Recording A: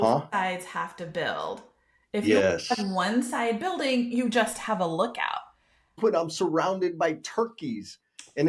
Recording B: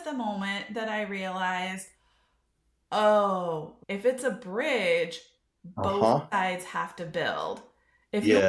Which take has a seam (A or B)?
A